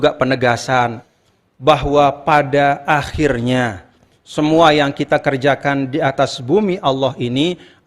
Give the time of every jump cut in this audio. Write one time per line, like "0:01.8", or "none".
0:01.0